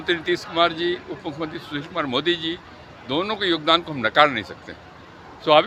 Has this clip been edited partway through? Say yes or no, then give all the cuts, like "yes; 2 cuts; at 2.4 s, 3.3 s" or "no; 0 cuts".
no; 0 cuts